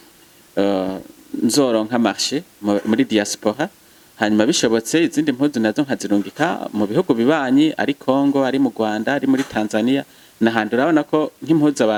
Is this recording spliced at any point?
no; 0 cuts

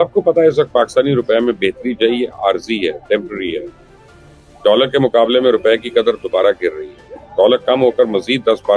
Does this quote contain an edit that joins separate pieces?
no; 0 cuts

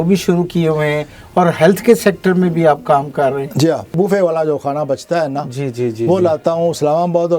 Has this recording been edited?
yes; 1 cut; at 3.9 s

